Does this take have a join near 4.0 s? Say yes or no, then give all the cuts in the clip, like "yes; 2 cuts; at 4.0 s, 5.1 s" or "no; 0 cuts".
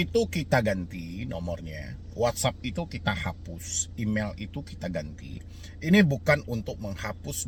no; 0 cuts